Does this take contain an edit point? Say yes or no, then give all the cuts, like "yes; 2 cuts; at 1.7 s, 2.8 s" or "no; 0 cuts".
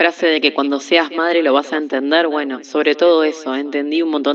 no; 0 cuts